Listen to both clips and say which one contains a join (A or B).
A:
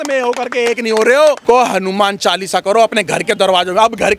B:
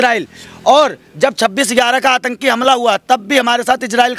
A